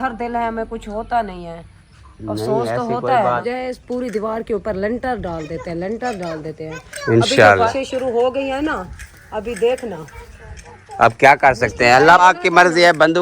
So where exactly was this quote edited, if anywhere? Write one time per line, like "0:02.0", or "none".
0:03.4
0:07.7
0:12.2